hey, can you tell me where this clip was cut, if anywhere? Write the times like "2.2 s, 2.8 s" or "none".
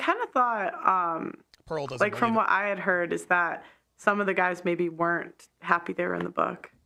none